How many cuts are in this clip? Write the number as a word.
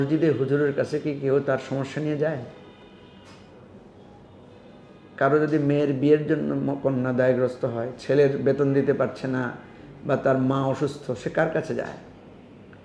zero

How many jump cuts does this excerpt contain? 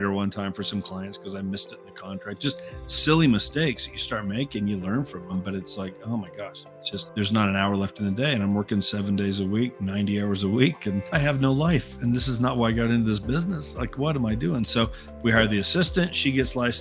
two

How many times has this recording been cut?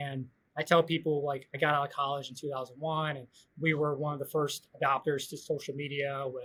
zero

